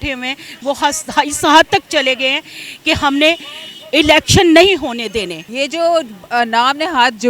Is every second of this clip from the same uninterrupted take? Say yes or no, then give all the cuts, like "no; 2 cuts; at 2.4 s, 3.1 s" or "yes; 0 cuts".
no; 1 cut; at 5.4 s